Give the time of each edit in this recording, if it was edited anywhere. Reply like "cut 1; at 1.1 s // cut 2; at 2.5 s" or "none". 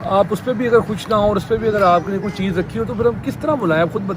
none